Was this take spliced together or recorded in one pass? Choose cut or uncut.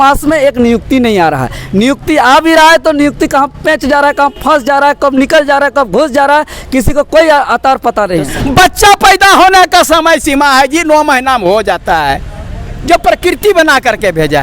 cut